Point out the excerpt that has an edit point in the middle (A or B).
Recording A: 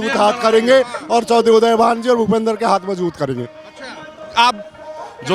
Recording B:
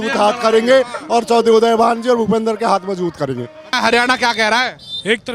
B